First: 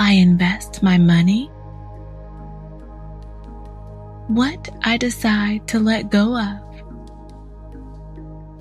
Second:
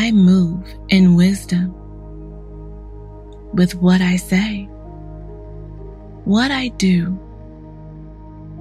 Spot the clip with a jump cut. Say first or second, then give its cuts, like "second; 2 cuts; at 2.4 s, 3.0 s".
second; 2 cuts; at 4.7 s, 6.2 s